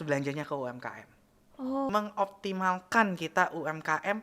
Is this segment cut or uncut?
cut